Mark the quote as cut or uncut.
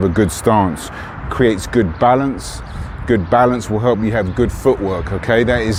uncut